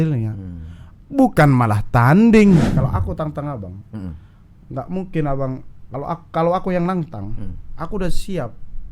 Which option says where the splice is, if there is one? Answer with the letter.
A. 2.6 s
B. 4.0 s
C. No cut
A